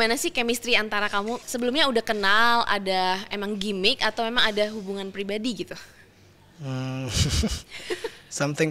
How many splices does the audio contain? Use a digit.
1